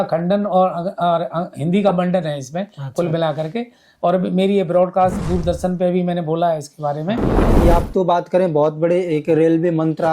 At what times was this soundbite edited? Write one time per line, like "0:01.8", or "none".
0:07.6